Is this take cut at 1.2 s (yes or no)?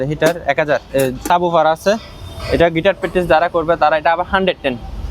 yes